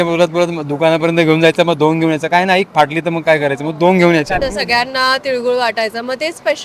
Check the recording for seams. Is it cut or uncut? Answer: cut